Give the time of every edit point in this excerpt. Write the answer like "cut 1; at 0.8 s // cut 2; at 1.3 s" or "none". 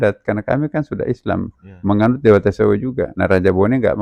cut 1; at 3.1 s